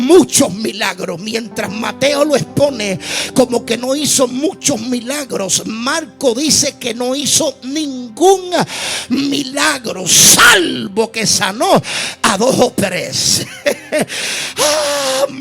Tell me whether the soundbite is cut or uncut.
uncut